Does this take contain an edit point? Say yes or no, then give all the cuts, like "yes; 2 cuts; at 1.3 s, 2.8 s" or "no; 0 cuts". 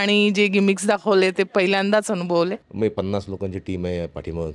yes; 1 cut; at 2.6 s